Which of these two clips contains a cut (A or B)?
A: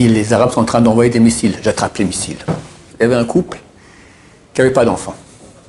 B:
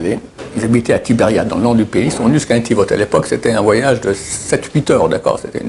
A